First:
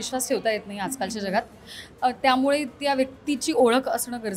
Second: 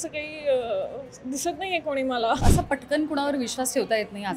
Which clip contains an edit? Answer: second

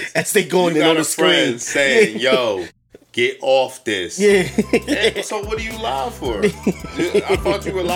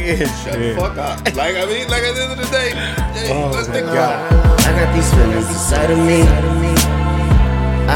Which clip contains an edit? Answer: second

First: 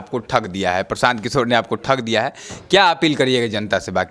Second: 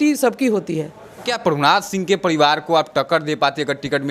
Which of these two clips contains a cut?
second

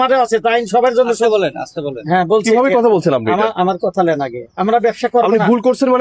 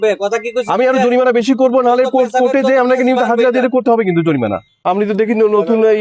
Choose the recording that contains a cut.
second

